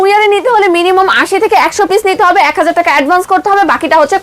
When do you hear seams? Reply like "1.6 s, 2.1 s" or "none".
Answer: none